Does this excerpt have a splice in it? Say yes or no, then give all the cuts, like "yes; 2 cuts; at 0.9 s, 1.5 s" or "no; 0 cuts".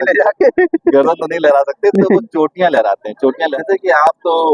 yes; 1 cut; at 3.5 s